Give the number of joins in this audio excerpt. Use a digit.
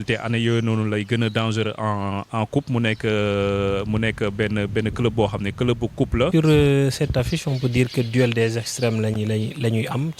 1